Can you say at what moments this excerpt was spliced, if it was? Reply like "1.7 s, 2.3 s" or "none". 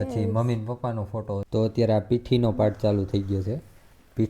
1.5 s